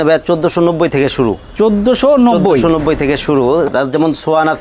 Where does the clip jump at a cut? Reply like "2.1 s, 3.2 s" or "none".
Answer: 3.7 s

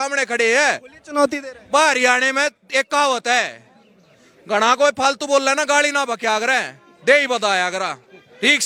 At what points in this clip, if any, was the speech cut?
none

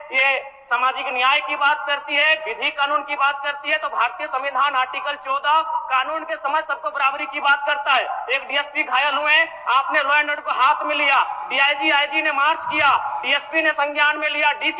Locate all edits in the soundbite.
none

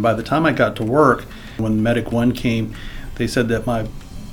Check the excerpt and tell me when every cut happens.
1.6 s

